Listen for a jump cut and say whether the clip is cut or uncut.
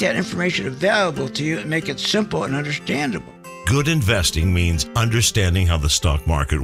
uncut